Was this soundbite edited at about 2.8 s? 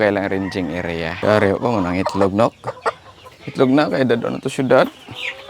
no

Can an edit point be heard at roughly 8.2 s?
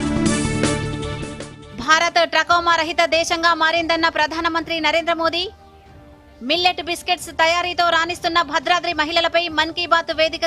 no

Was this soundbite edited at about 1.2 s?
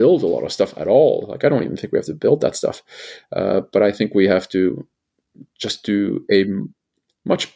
no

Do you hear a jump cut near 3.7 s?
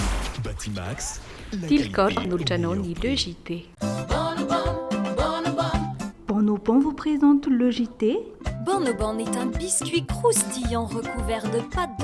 yes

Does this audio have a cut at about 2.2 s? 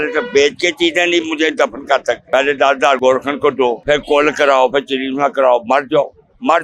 yes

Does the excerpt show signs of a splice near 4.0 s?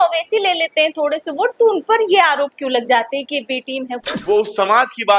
yes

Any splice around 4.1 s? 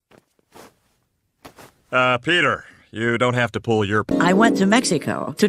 yes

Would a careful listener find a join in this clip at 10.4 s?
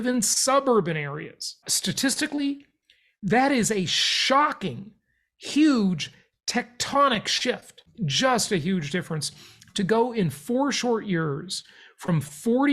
no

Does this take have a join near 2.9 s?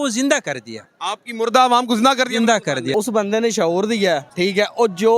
yes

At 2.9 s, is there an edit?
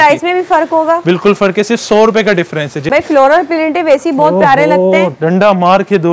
yes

